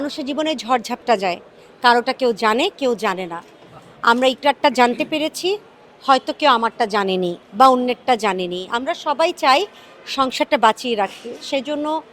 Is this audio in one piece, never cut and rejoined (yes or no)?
yes